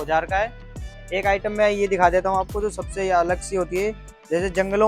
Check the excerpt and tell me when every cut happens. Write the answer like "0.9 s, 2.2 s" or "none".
1.0 s